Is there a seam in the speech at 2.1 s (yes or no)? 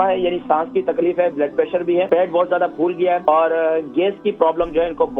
yes